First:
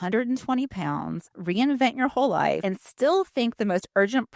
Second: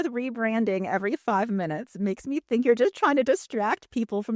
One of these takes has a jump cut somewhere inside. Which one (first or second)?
first